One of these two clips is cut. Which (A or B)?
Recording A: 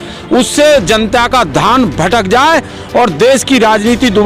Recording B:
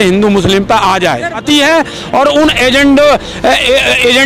B